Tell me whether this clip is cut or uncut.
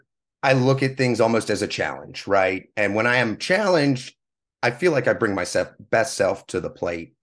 uncut